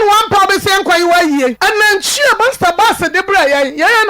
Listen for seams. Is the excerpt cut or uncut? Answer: cut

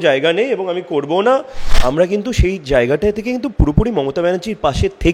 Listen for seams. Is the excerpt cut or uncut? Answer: cut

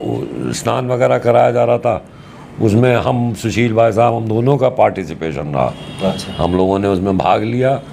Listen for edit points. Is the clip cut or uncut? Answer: uncut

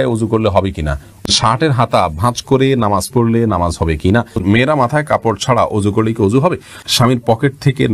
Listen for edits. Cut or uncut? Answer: cut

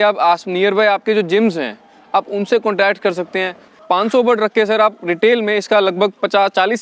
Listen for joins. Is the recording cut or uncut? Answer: cut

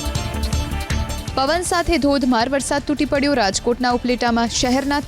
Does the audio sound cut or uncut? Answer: uncut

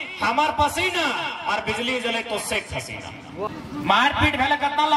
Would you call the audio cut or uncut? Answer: cut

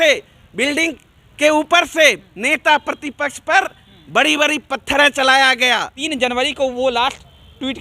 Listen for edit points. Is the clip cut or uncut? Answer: cut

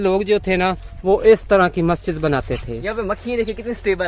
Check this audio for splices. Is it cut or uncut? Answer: cut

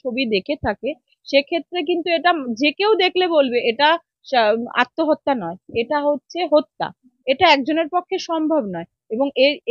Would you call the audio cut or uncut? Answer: cut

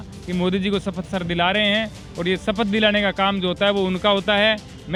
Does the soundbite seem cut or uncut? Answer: uncut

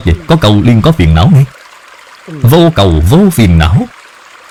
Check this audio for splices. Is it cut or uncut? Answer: uncut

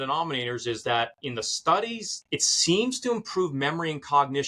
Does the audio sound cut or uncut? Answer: cut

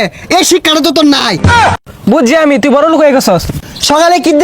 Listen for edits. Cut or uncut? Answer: cut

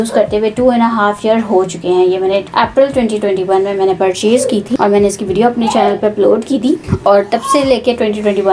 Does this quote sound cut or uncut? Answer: uncut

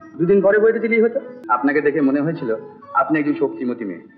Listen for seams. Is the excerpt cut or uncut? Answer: cut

